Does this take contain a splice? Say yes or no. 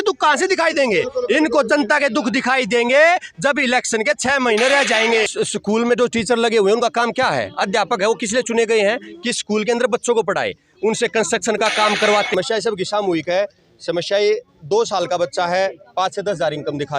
yes